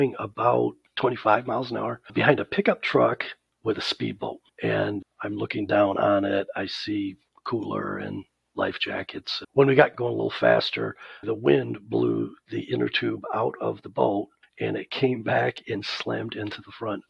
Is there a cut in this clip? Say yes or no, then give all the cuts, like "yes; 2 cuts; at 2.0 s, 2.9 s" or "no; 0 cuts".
yes; 4 cuts; at 5.0 s, 9.4 s, 9.9 s, 11.2 s